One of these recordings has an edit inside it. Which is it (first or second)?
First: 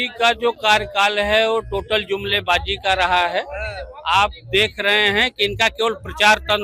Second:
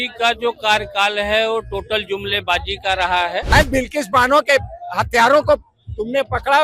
second